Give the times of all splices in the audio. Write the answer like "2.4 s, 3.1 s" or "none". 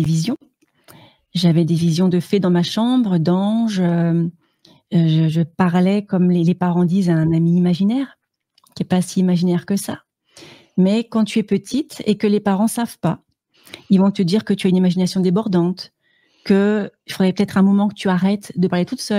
none